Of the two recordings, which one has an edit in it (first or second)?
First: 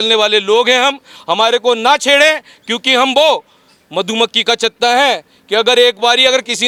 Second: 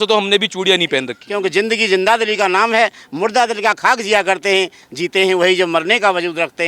second